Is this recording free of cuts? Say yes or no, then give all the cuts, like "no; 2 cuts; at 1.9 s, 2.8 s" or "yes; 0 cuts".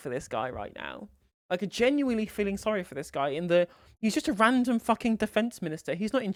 yes; 0 cuts